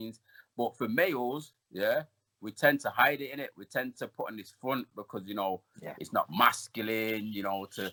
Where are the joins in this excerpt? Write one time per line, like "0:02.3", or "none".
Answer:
none